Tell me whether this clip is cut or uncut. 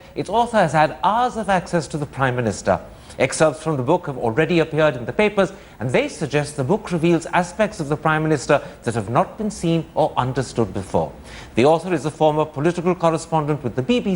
uncut